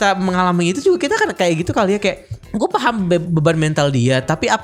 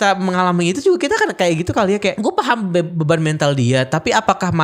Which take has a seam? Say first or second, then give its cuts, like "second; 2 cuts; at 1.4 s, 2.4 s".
second; 1 cut; at 2.2 s